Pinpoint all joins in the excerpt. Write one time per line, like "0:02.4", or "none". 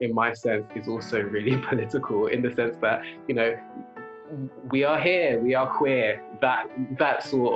none